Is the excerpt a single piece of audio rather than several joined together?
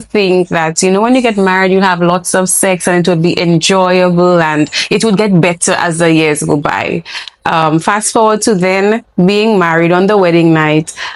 yes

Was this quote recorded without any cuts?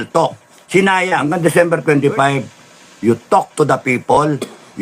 no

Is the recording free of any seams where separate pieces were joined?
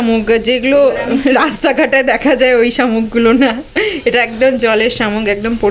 yes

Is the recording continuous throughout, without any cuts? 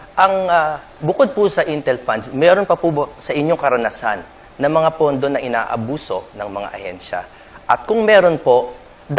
yes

